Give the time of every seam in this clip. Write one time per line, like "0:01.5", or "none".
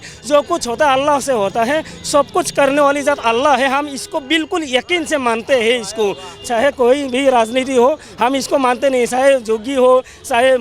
none